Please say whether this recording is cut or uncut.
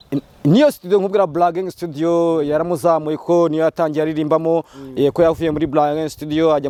uncut